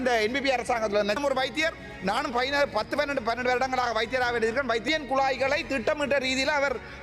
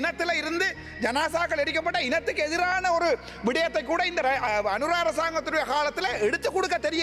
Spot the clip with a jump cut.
first; 2 cuts; at 1.2 s, 4.8 s

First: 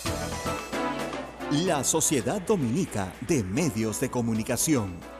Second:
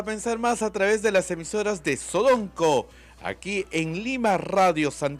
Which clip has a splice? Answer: first; 1 cut; at 1.2 s

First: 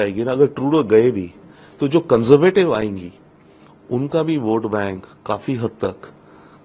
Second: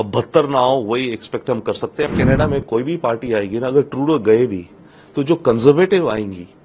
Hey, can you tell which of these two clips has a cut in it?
second; 1 cut; at 2.1 s

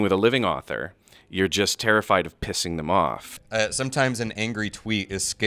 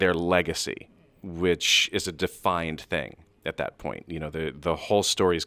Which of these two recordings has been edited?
first; 1 cut; at 3.4 s

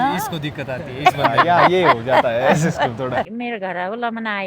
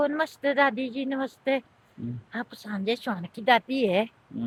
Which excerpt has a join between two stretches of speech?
first; 1 cut; at 3.3 s

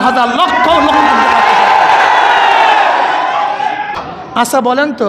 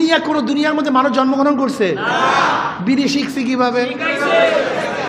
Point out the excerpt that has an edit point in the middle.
first; 1 cut; at 4.0 s

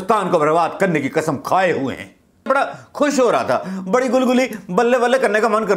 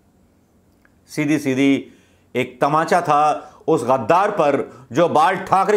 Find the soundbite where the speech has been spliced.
first; 1 cut; at 2.5 s

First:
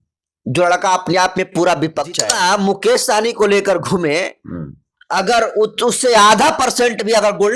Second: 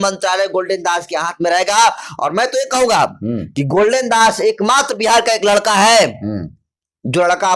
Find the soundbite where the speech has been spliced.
first; 1 cut; at 2.3 s

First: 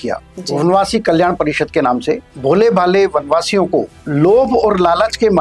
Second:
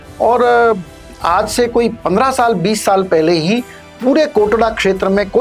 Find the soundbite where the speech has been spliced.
first; 2 cuts; at 2.3 s, 4.0 s

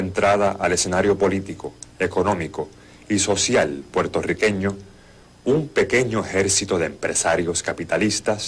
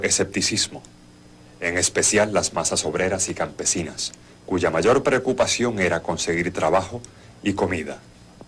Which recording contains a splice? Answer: second; 1 cut; at 1.5 s

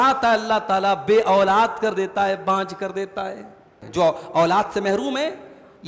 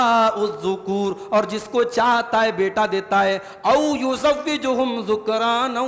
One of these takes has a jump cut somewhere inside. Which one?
first; 1 cut; at 3.8 s

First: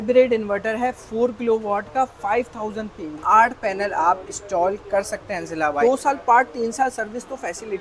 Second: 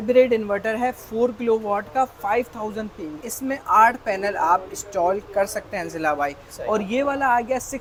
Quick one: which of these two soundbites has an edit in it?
first; 2 cuts; at 3.2 s, 5.8 s

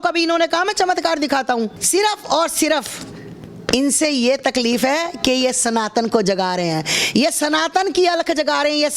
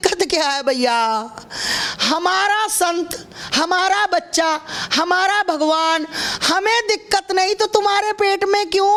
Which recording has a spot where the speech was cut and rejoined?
first; 1 cut; at 1.8 s

